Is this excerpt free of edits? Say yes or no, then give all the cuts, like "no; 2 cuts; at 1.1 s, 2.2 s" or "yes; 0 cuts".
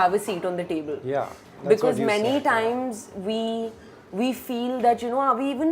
yes; 0 cuts